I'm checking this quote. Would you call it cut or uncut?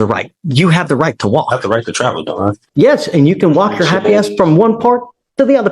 cut